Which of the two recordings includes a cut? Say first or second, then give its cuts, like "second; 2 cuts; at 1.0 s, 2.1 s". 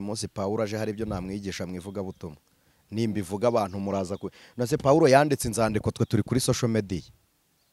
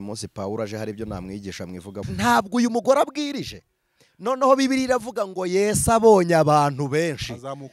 second; 1 cut; at 2.0 s